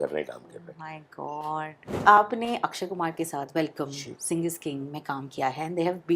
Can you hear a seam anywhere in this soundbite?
yes; 1 cut; at 2.0 s

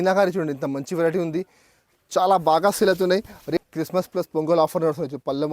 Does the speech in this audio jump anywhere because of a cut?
yes; 1 cut; at 3.6 s

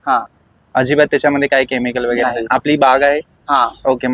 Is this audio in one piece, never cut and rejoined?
yes; 0 cuts

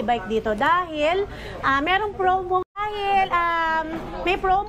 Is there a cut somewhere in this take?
no; 0 cuts

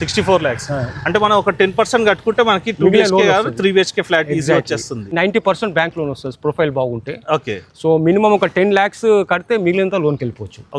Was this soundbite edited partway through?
no; 0 cuts

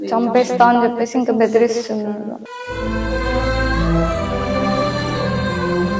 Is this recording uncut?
yes; 0 cuts

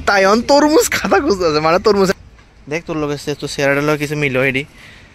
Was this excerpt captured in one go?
no; 1 cut; at 2.2 s

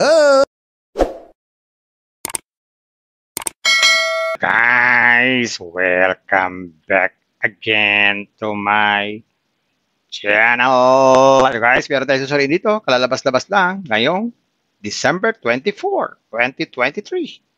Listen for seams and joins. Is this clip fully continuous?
no; 1 cut; at 4.3 s

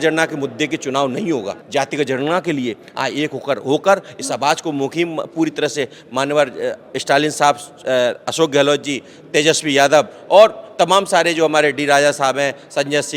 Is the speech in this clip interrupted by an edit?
yes; 1 cut; at 1.6 s

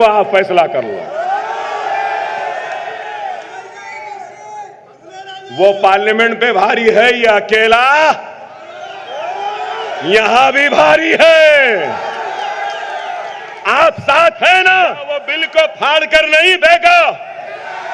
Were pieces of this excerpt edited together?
yes; 1 cut; at 15.4 s

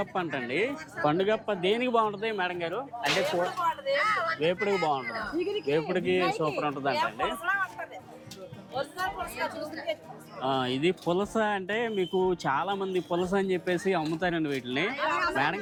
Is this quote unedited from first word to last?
yes; 0 cuts

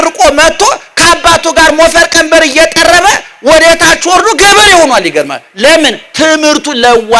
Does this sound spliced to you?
no; 0 cuts

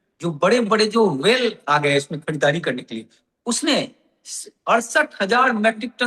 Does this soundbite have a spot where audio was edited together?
no; 0 cuts

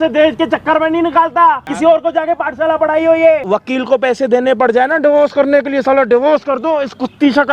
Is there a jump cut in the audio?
yes; 2 cuts; at 1.7 s, 3.4 s

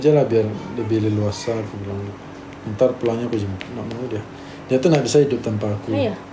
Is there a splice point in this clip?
no; 0 cuts

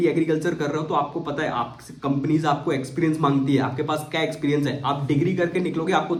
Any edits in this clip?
no; 0 cuts

